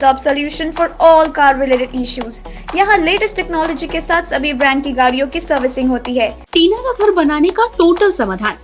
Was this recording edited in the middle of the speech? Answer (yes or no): yes